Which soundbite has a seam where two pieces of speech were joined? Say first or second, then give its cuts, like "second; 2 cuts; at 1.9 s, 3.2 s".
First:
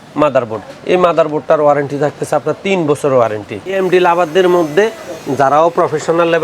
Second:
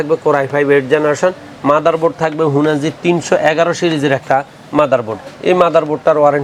first; 1 cut; at 3.8 s